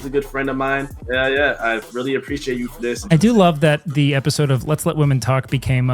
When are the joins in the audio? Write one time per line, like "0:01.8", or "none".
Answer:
0:01.0
0:03.0